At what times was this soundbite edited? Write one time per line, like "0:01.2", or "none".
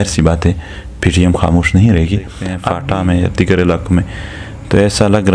0:02.7

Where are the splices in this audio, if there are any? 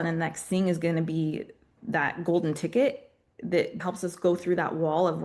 0:01.7
0:03.8

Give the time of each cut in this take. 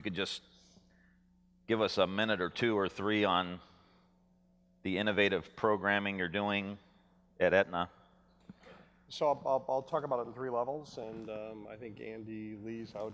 0:04.3

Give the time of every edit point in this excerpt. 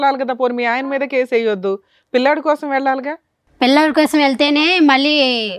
none

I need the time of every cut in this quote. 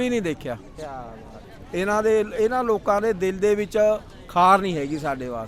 0:01.0

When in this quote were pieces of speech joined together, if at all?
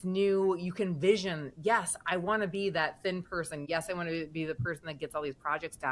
0:03.6

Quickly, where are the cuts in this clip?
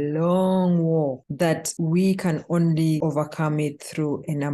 0:01.7
0:03.0

